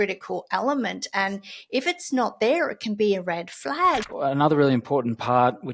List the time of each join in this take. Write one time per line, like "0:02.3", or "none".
0:04.1